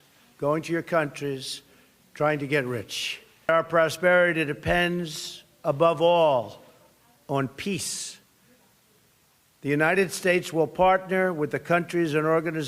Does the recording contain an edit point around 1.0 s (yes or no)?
no